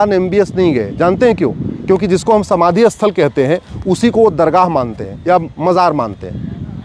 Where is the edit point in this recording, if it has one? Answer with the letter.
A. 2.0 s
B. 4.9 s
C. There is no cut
C